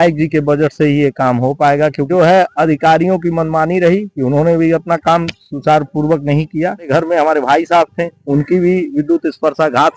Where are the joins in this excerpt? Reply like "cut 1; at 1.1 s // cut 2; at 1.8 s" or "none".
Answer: cut 1; at 2.1 s // cut 2; at 6.9 s